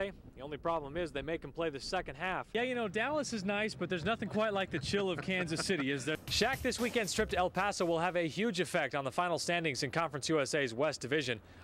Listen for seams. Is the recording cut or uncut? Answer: uncut